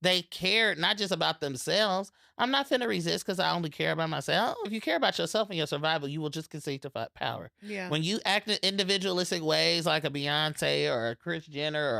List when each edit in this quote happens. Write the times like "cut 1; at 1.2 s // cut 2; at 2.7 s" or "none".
cut 1; at 4.7 s